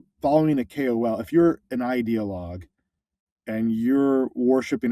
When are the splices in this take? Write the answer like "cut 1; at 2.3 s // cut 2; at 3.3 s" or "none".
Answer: none